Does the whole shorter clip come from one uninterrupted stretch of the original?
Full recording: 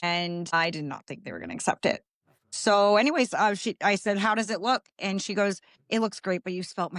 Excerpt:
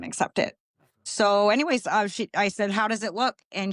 yes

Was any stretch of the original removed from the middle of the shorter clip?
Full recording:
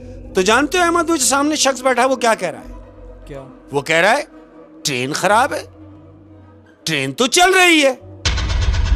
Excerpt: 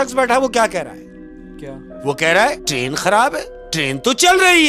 yes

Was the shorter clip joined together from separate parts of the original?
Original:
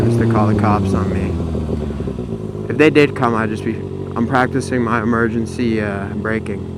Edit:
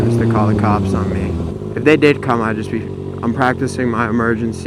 yes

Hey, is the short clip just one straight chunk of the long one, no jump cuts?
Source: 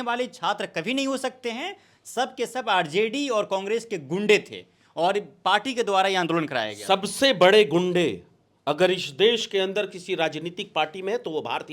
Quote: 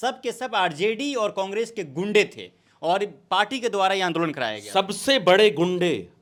yes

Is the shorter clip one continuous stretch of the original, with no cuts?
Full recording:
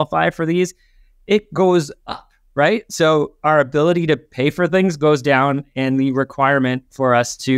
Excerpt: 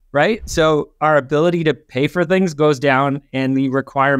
yes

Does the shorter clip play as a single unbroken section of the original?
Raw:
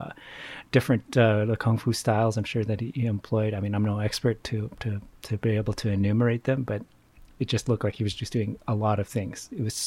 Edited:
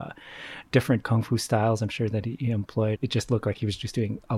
no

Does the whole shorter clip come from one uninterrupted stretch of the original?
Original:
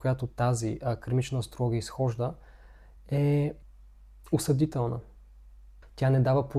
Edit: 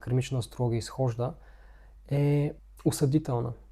no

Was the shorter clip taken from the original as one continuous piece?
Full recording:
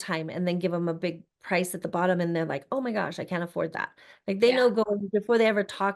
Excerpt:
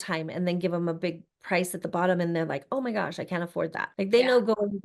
no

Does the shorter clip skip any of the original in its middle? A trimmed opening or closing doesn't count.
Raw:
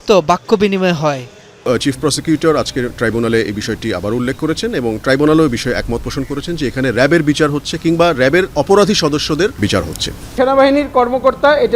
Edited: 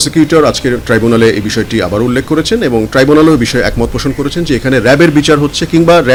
no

